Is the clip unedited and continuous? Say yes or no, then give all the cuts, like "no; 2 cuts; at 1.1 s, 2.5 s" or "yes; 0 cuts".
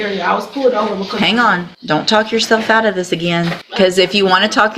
no; 2 cuts; at 1.7 s, 3.6 s